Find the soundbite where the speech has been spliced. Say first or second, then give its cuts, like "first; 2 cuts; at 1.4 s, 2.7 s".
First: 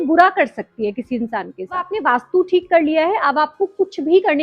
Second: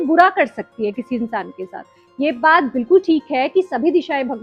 first; 1 cut; at 1.9 s